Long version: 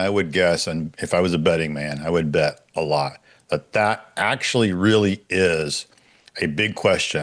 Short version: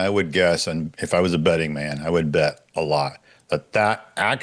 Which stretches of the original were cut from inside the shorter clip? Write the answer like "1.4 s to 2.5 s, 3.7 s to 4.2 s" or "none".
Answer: none